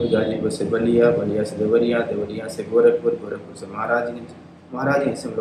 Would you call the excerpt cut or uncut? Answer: uncut